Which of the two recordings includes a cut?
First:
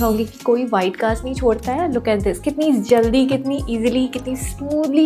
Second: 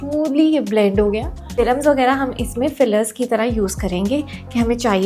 second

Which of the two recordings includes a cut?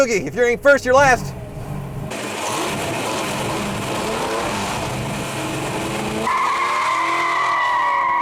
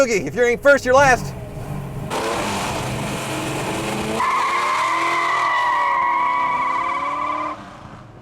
second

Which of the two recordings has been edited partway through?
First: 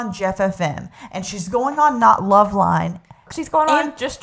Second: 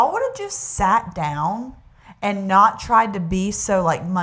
first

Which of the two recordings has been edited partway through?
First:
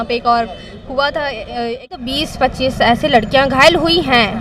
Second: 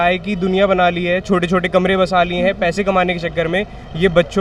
first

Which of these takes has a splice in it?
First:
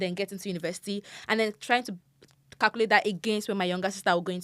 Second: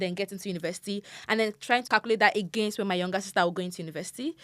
second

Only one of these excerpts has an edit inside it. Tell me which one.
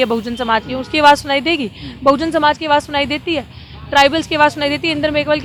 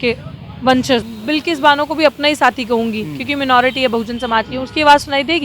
second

